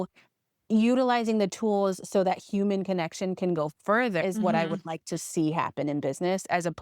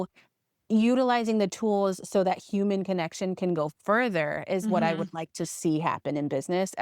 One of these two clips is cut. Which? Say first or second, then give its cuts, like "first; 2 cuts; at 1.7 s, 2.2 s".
first; 1 cut; at 4.2 s